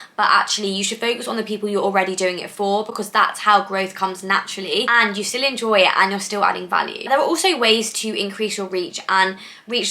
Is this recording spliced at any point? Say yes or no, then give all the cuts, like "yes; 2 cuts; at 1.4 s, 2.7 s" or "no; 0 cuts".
no; 0 cuts